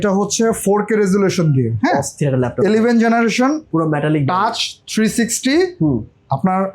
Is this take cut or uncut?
uncut